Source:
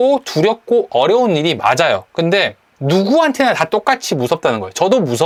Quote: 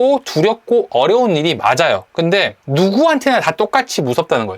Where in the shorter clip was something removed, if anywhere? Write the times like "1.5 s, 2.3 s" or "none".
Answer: 2.6 s